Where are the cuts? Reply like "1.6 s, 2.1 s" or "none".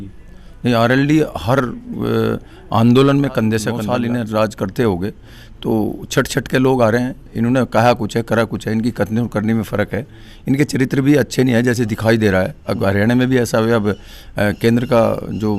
3.8 s